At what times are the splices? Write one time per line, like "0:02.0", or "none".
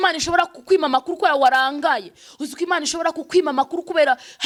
none